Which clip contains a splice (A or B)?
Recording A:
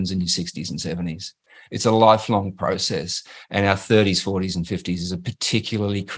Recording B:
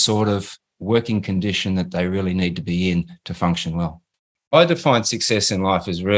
B